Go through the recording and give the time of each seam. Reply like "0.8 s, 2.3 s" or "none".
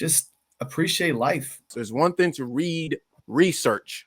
1.8 s

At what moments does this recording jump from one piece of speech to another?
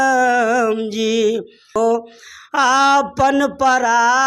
1.8 s

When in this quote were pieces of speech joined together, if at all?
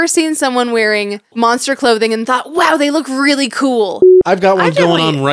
1.3 s, 4.1 s

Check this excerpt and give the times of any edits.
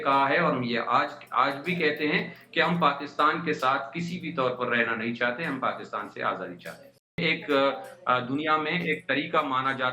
7.2 s

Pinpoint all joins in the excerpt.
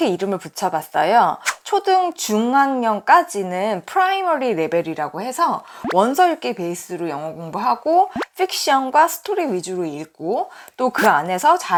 none

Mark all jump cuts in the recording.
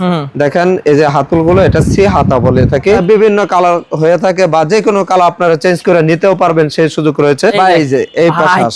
3.0 s, 7.5 s

